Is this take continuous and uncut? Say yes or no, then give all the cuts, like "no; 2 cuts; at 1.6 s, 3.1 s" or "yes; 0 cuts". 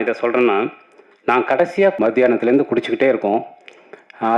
no; 1 cut; at 2.0 s